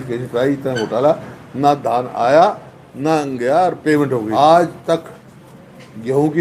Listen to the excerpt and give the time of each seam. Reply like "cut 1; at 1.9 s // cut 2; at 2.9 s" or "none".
cut 1; at 4.3 s

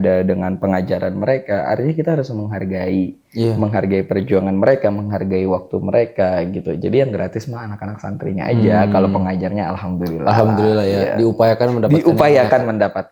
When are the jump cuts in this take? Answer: none

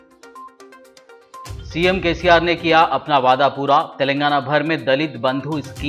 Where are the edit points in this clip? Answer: cut 1; at 1.5 s

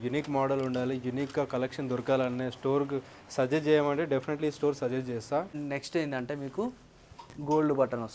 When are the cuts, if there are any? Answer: cut 1; at 5.5 s

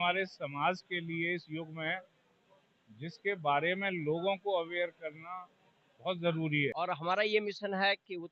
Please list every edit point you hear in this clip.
cut 1; at 6.7 s

